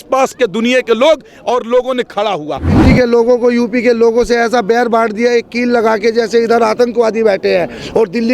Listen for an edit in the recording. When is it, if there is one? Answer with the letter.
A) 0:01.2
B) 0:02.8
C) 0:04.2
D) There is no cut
B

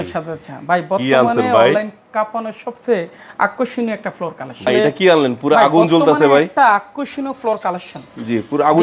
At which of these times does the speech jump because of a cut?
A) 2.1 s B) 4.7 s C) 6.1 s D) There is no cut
B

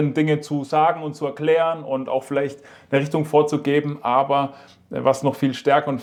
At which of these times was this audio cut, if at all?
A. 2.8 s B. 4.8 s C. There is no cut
C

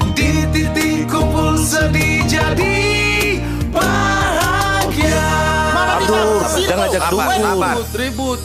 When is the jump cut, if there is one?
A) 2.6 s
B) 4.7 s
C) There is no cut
C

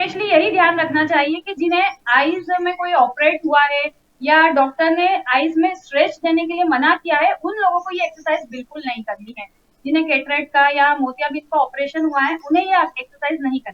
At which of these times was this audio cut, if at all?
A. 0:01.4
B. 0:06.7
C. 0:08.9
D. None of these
D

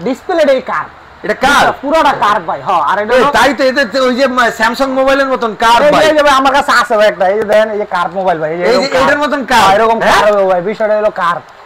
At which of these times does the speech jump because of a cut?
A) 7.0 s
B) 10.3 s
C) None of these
C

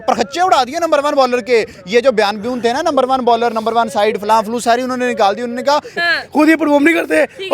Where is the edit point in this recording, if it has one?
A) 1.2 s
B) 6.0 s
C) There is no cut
B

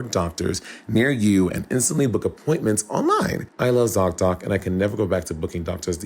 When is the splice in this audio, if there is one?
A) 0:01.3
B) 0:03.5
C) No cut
B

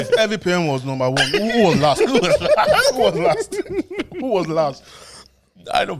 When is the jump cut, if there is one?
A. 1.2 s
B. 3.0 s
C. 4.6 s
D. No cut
D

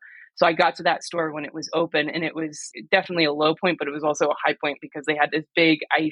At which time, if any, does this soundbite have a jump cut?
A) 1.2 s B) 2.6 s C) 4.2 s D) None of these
B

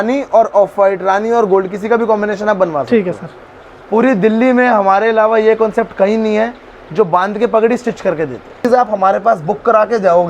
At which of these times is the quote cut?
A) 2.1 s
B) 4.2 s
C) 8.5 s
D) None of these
C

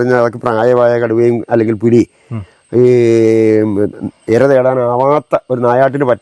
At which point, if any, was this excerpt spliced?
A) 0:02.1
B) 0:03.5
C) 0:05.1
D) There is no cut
D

